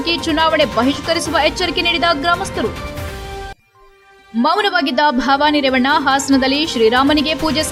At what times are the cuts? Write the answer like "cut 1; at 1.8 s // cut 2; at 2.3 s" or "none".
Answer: none